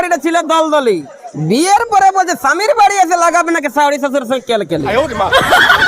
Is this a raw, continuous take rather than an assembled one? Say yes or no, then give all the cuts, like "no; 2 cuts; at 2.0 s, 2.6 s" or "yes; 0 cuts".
no; 1 cut; at 4.8 s